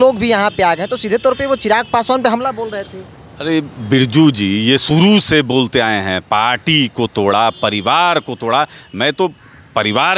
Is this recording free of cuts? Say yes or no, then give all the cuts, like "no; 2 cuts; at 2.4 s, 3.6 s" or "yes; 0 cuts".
yes; 0 cuts